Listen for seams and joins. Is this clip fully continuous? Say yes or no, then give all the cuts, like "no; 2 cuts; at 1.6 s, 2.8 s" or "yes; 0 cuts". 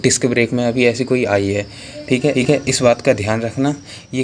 yes; 0 cuts